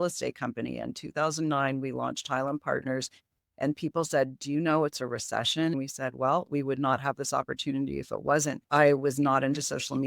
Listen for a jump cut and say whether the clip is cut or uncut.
uncut